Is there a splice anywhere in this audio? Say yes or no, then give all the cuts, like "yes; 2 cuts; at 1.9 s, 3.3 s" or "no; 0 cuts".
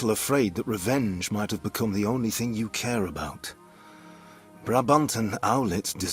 no; 0 cuts